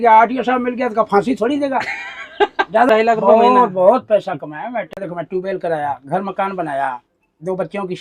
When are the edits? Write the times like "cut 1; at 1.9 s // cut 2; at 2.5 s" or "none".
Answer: cut 1; at 2.9 s // cut 2; at 5.0 s